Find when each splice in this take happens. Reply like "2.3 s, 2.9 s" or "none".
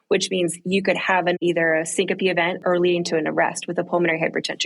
1.4 s, 2.6 s